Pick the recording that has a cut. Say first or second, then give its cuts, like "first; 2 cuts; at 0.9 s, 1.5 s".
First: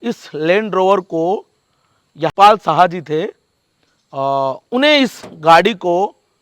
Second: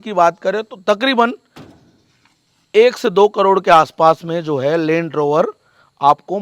first; 1 cut; at 2.3 s